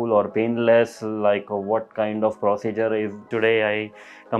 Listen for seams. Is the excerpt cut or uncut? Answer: cut